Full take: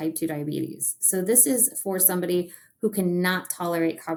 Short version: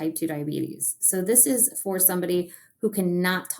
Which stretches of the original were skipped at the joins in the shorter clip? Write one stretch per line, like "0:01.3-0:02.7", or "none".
none